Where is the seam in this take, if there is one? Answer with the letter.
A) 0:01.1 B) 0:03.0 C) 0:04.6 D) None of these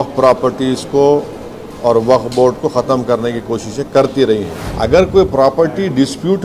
C